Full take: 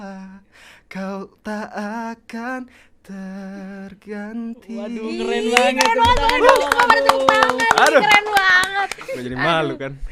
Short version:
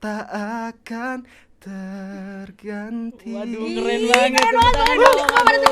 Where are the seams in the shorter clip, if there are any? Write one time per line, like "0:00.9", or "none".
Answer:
none